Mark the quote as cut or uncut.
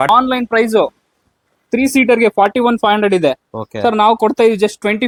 uncut